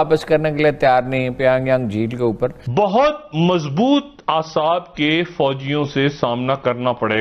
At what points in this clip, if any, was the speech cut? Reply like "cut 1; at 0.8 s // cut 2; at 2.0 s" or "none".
cut 1; at 2.6 s